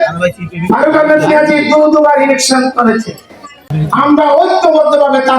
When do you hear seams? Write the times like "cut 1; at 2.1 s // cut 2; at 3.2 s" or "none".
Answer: cut 1; at 3.7 s